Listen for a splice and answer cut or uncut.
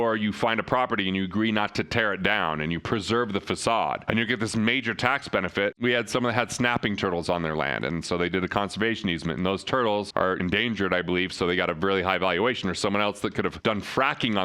cut